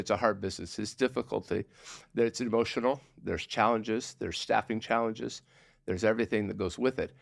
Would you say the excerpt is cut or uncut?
uncut